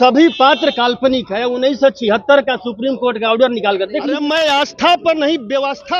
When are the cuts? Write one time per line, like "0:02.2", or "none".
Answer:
0:04.2